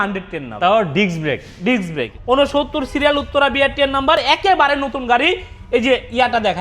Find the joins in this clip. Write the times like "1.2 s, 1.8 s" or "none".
2.1 s